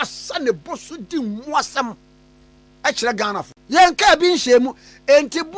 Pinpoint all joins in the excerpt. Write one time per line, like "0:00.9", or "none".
0:03.5